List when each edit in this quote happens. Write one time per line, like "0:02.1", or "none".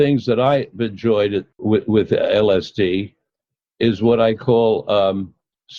0:01.5